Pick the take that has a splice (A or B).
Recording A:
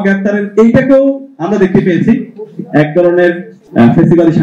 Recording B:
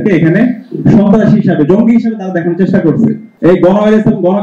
B